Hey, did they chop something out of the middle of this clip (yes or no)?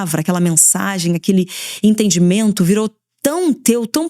no